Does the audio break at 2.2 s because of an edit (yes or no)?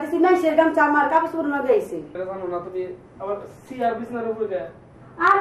yes